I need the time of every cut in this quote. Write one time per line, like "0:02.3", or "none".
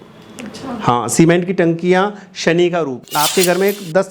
0:03.0